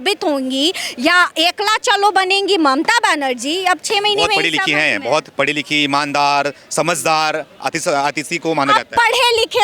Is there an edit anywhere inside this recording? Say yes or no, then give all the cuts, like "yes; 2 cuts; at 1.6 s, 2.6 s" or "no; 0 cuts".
no; 0 cuts